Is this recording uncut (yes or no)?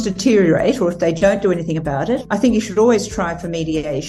yes